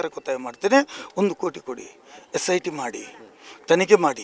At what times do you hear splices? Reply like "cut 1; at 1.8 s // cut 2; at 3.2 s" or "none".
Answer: none

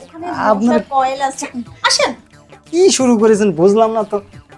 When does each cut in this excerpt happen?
none

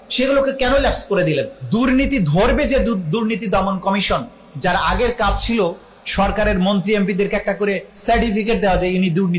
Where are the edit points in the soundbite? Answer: cut 1; at 1.6 s

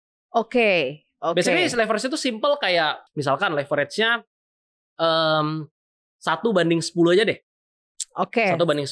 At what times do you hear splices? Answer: cut 1; at 3.0 s

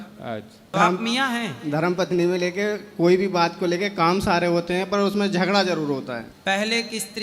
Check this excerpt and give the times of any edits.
cut 1; at 0.7 s // cut 2; at 6.3 s

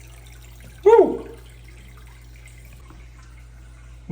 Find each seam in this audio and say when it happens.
cut 1; at 2.8 s

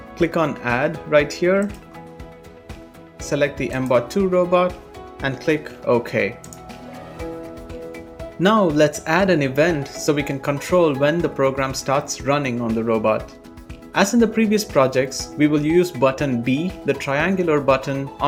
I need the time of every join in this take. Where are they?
none

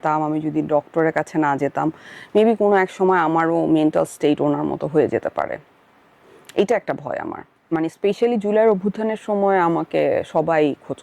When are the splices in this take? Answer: cut 1; at 7.6 s

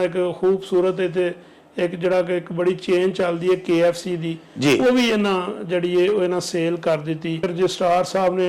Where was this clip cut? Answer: cut 1; at 7.5 s

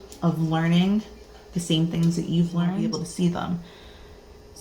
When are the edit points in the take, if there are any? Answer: cut 1; at 3.0 s

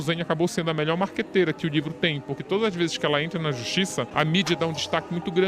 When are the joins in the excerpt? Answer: cut 1; at 4.1 s

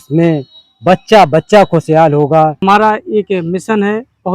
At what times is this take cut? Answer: cut 1; at 2.6 s

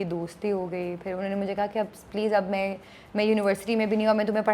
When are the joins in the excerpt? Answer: none

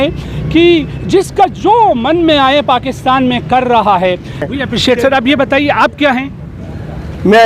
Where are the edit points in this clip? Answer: cut 1; at 4.4 s

